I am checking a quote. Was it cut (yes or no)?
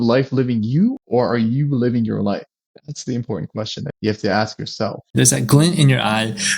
yes